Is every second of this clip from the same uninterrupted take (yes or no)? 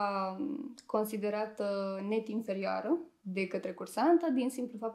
no